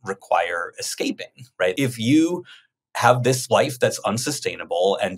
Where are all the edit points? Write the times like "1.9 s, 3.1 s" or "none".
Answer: 1.7 s